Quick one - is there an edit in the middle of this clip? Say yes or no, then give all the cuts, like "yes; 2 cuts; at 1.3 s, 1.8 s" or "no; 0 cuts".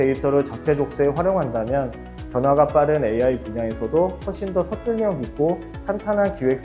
no; 0 cuts